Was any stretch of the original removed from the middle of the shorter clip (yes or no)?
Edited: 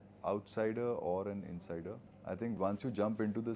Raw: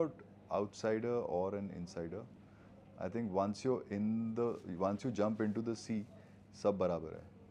yes